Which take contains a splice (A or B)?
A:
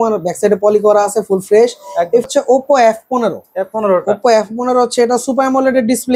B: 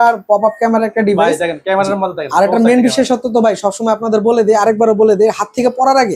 A